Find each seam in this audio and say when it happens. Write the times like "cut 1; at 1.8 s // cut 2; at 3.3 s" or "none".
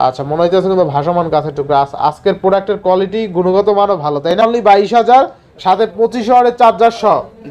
cut 1; at 4.4 s

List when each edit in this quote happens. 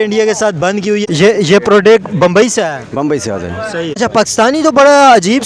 cut 1; at 1.0 s // cut 2; at 4.0 s

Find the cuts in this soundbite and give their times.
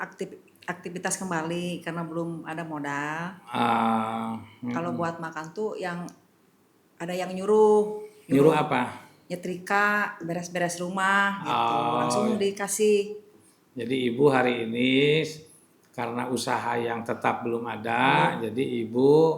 none

